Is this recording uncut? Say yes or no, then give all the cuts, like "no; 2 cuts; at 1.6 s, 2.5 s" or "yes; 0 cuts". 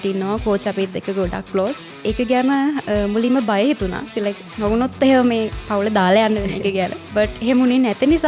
no; 2 cuts; at 1.9 s, 7.0 s